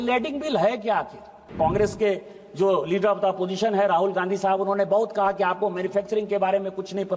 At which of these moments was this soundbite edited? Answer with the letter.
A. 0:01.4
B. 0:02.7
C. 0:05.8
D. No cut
A